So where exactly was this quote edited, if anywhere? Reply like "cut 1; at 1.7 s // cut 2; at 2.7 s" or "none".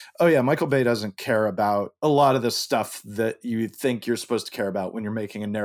cut 1; at 1.9 s